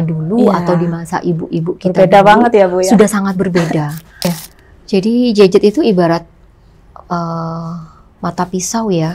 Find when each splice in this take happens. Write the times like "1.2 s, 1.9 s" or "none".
4.2 s